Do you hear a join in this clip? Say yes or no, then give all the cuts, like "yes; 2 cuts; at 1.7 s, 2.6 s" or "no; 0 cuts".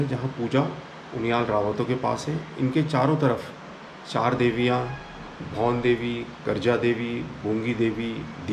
no; 0 cuts